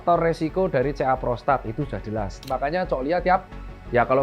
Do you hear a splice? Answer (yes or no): yes